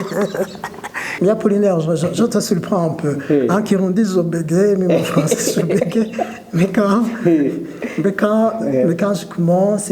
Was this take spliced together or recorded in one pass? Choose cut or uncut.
cut